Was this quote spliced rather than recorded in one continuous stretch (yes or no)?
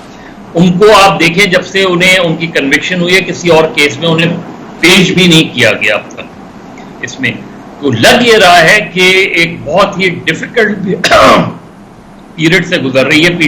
no